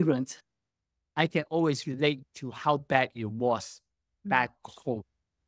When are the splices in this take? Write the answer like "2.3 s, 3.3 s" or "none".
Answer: none